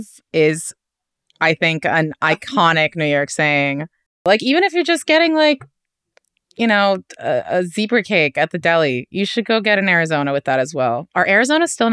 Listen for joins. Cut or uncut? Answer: cut